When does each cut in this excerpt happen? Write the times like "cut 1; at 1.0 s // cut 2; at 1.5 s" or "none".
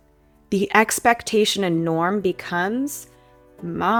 none